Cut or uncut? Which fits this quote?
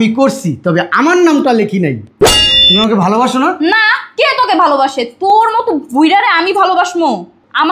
cut